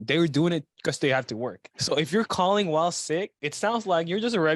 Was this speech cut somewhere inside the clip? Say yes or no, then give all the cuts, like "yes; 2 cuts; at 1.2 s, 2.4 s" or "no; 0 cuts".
yes; 2 cuts; at 1.7 s, 3.4 s